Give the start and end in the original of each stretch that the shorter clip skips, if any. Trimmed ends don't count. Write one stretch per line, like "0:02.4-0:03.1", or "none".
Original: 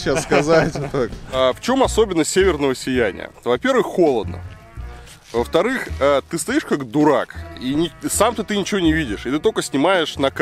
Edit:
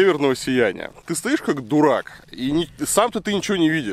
0:03.4-0:06.2